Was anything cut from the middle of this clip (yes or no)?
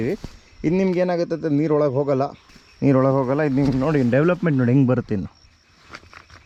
no